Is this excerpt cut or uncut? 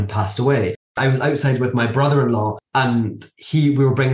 cut